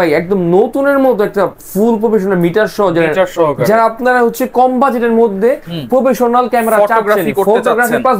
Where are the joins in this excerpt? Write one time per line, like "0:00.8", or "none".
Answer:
none